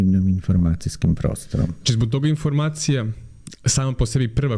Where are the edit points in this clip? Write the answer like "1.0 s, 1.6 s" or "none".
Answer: none